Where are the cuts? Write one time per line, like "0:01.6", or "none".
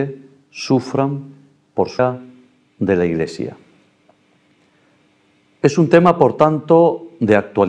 none